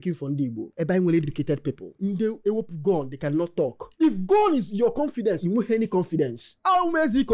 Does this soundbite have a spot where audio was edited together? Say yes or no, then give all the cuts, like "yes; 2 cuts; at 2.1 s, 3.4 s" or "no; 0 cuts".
no; 0 cuts